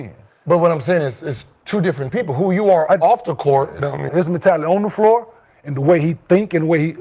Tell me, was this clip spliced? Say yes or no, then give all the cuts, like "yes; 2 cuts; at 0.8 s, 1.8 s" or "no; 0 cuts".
yes; 1 cut; at 4.1 s